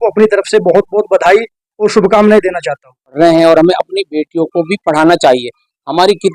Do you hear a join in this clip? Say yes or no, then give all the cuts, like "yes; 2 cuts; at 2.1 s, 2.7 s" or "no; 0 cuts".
yes; 1 cut; at 3.2 s